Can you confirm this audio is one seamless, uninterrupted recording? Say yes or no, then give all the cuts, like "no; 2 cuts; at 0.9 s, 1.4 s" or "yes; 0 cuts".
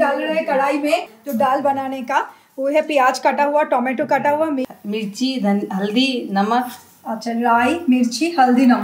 no; 2 cuts; at 1.2 s, 4.7 s